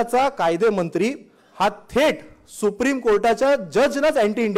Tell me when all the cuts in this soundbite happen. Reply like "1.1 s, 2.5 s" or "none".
none